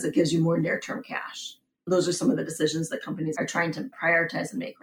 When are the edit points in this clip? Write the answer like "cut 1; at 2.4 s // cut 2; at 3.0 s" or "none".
none